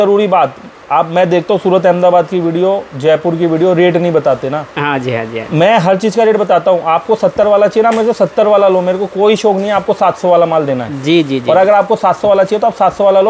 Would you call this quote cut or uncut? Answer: uncut